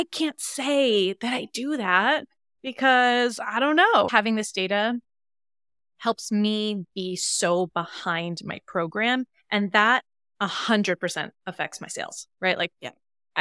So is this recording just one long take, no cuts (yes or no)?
no